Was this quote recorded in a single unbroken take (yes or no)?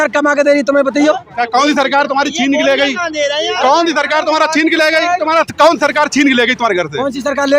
no